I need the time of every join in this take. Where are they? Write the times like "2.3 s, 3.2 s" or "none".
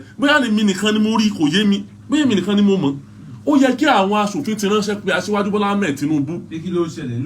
none